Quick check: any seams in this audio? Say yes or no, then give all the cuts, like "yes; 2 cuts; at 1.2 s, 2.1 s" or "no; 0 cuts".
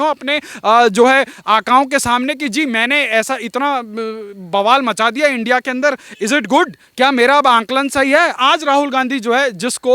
yes; 1 cut; at 8.3 s